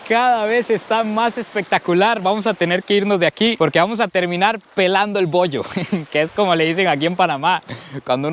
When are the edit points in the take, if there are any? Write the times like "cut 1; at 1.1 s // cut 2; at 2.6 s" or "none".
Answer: none

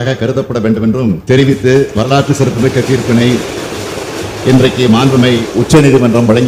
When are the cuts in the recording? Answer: none

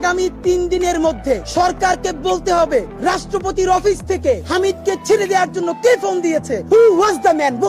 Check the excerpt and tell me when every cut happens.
cut 1; at 1.5 s // cut 2; at 2.9 s // cut 3; at 4.4 s // cut 4; at 6.5 s

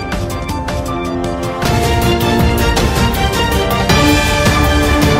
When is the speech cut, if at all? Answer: cut 1; at 1.1 s

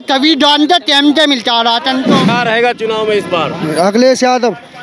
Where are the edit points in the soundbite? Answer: cut 1; at 2.3 s

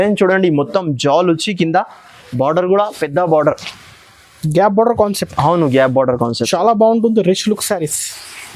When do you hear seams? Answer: none

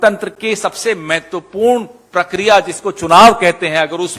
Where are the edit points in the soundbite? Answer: none

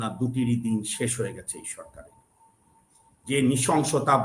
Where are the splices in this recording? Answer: none

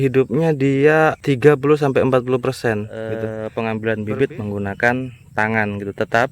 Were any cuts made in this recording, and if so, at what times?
cut 1; at 3.4 s

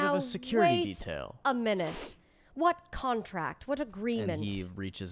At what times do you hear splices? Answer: none

